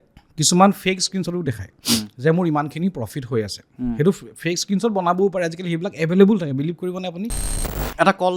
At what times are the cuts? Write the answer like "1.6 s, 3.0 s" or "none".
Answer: 7.5 s

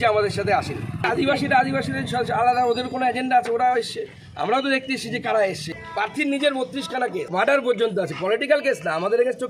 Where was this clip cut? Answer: 1.1 s, 5.8 s, 7.3 s

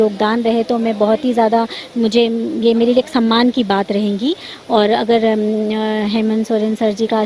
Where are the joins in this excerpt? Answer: none

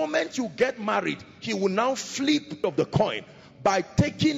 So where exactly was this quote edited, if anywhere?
2.6 s

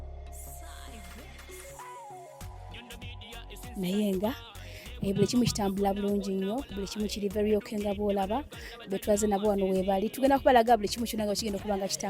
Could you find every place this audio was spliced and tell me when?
3.7 s

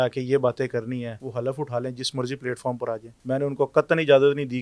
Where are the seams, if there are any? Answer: 1.2 s, 3.1 s

